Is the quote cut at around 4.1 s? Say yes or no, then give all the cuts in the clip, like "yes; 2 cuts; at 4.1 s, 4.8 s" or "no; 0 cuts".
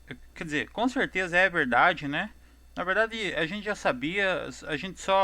yes; 1 cut; at 4.1 s